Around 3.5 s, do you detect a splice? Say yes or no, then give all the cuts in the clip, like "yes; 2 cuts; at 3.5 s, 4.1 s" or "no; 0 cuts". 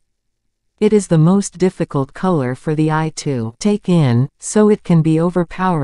yes; 1 cut; at 3.5 s